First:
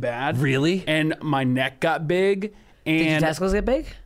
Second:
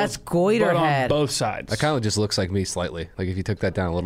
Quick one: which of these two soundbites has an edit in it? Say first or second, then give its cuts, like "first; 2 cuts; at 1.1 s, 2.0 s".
second; 1 cut; at 3.1 s